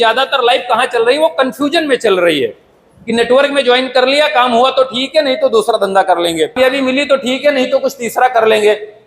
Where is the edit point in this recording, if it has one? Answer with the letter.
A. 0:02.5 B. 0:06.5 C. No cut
B